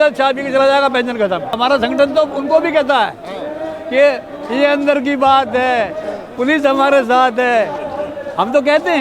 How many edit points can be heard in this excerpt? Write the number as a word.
one